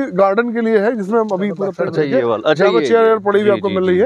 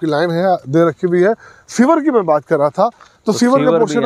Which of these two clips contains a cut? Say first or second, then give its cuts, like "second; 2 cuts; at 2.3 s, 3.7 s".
first; 1 cut; at 1.7 s